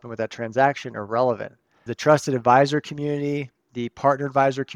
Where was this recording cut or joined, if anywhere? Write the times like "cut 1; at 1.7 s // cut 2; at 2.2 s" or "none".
cut 1; at 1.9 s